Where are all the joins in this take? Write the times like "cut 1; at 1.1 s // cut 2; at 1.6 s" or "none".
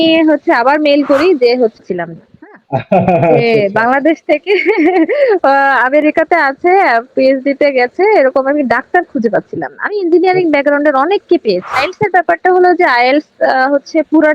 cut 1; at 1.7 s // cut 2; at 11.7 s